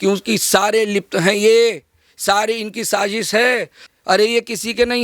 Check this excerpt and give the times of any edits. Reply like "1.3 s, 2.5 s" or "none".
3.8 s